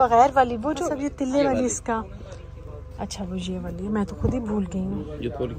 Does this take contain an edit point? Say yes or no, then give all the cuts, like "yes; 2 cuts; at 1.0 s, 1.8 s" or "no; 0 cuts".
no; 0 cuts